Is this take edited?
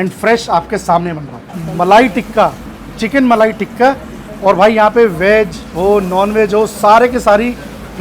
yes; 1 cut; at 1.6 s

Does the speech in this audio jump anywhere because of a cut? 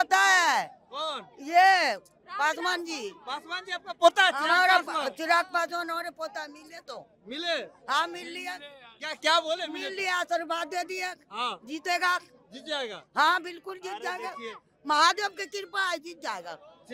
no; 0 cuts

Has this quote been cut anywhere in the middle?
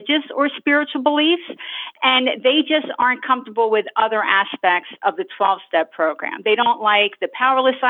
no; 0 cuts

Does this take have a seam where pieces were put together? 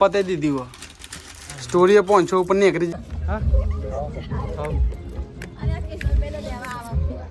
yes; 1 cut; at 2.9 s

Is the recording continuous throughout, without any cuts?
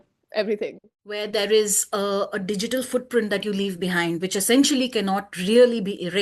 no; 1 cut; at 1.2 s

